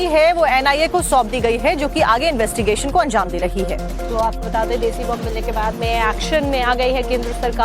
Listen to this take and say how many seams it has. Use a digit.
1